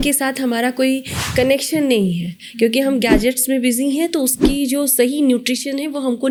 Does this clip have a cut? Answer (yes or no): no